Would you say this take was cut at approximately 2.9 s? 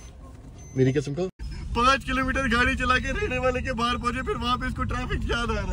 no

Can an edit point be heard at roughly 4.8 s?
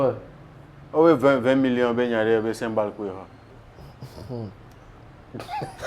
no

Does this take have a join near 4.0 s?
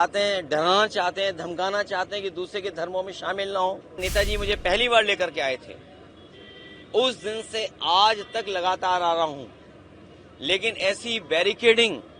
yes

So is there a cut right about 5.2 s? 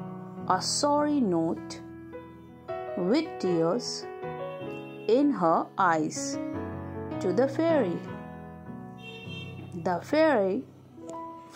no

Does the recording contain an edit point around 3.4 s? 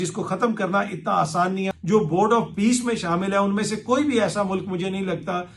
no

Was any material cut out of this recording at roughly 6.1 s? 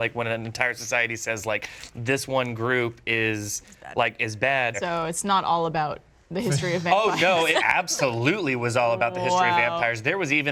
no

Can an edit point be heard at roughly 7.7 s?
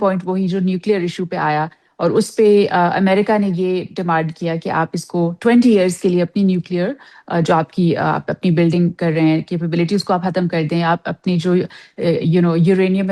no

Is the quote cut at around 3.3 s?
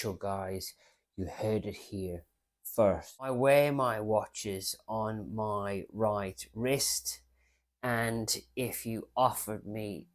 yes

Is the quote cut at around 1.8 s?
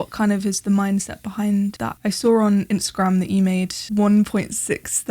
yes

